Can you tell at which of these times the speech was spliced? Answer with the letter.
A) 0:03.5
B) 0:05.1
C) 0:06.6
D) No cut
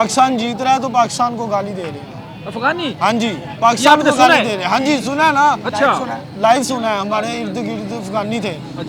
D